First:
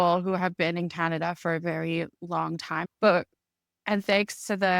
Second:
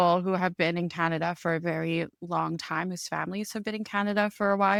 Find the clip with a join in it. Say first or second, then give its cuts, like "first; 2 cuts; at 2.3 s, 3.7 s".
first; 1 cut; at 2.9 s